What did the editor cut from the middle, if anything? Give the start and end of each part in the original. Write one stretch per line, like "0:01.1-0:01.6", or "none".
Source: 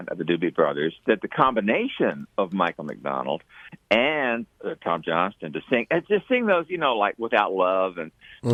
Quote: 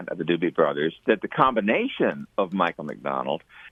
none